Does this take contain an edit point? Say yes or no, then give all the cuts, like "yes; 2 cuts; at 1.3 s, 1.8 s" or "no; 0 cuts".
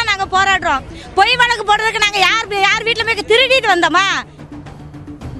yes; 1 cut; at 4.4 s